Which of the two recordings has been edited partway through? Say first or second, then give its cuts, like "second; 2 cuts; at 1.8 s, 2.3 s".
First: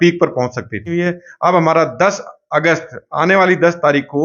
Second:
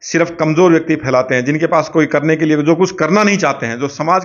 first; 1 cut; at 0.9 s